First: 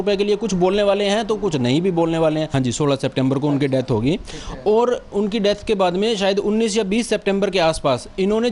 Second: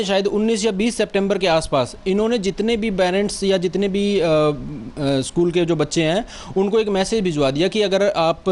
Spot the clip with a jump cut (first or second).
first